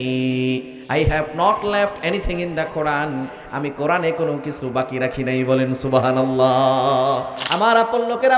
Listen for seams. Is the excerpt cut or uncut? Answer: cut